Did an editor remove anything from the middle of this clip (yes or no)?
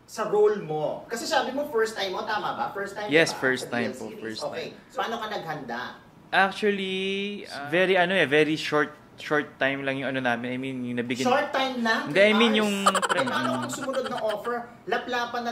yes